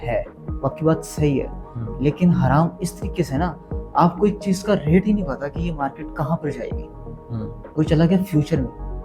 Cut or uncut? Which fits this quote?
uncut